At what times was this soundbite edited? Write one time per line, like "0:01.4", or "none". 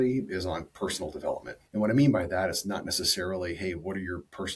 0:01.6